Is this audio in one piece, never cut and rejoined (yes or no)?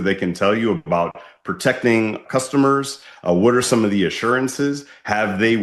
yes